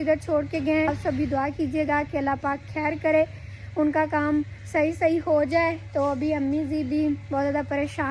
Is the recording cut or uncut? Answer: cut